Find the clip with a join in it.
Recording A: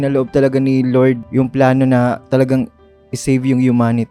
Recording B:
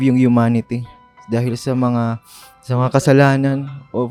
A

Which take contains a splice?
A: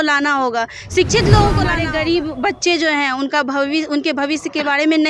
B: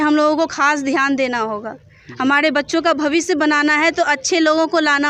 A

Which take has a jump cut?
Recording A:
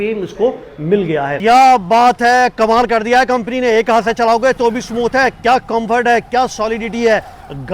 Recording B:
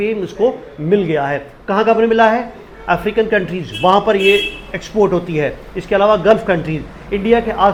A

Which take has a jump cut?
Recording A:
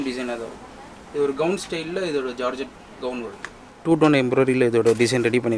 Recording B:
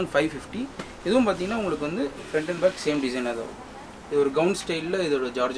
A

